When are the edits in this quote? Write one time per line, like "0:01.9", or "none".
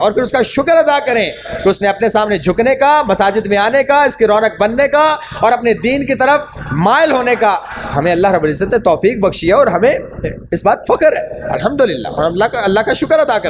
none